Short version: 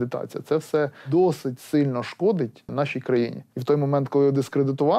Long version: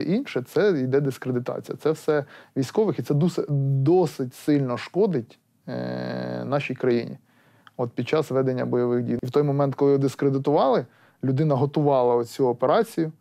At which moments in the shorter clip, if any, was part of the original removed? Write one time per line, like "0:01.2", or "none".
0:01.0
0:02.7
0:03.6